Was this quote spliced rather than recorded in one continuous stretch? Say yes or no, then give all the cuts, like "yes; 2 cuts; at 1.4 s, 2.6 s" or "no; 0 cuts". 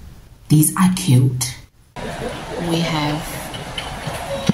yes; 1 cut; at 1.9 s